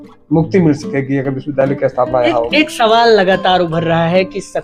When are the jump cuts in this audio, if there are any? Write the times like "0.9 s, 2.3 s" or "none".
none